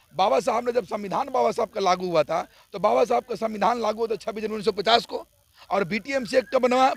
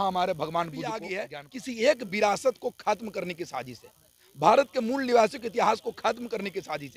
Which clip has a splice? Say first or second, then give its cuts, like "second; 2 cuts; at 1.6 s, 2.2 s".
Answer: second; 1 cut; at 1.2 s